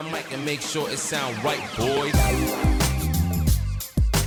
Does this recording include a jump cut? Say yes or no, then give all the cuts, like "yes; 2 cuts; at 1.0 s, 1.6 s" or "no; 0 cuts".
no; 0 cuts